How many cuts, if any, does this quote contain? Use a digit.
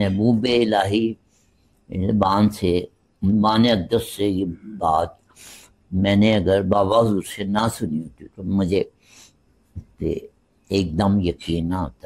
0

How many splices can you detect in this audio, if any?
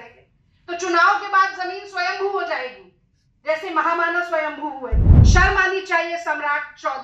1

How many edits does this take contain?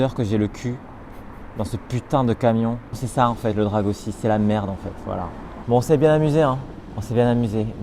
2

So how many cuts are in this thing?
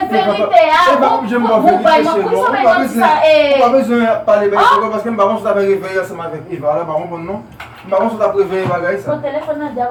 0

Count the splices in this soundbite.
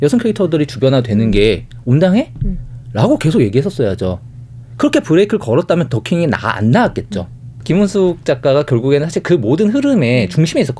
0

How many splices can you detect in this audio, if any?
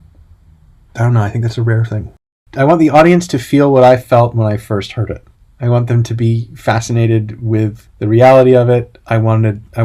2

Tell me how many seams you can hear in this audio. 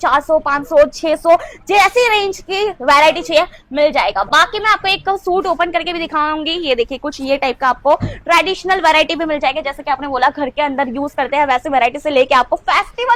0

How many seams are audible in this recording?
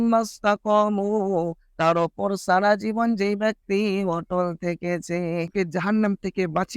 1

